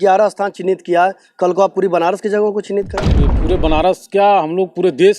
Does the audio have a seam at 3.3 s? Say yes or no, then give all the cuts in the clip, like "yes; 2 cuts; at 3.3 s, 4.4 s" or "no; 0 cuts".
yes; 1 cut; at 3.3 s